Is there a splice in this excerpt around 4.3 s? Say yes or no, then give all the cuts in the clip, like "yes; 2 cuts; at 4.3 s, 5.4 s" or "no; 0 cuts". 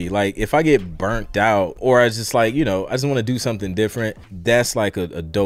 yes; 2 cuts; at 1.7 s, 4.3 s